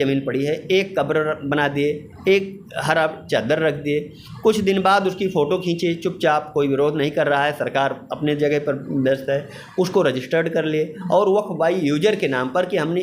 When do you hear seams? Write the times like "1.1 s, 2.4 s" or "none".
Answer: none